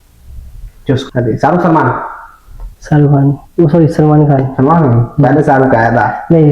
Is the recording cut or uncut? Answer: cut